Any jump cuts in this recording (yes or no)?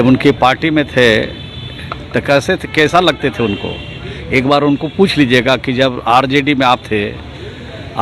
no